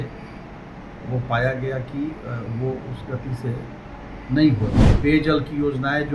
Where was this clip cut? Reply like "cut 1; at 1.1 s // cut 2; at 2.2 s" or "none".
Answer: cut 1; at 4.8 s